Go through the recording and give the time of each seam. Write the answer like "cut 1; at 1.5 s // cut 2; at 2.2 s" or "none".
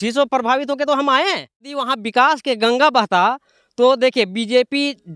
cut 1; at 1.9 s